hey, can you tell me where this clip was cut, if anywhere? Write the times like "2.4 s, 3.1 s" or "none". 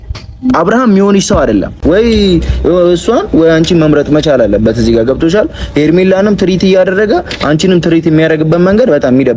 1.7 s